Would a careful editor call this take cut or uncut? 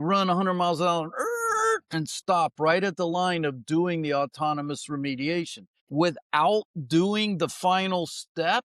cut